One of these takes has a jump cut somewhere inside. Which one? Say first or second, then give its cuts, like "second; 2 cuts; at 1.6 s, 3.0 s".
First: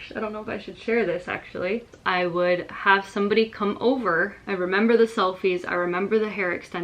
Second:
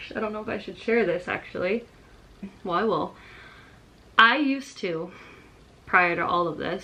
first; 2 cuts; at 1.9 s, 4.4 s